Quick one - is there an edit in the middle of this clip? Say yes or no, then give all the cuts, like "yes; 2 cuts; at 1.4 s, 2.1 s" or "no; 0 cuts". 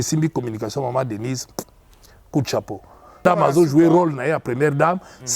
yes; 1 cut; at 3.2 s